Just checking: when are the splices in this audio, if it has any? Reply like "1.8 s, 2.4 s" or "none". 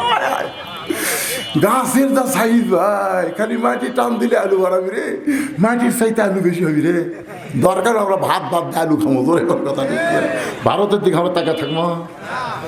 none